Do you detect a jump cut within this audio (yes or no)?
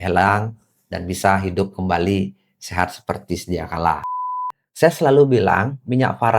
yes